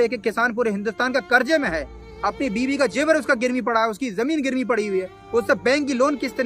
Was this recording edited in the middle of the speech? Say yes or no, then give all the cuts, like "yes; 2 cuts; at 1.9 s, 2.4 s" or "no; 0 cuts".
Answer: no; 0 cuts